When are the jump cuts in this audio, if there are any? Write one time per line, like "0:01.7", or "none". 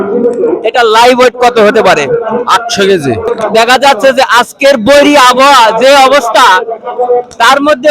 0:03.3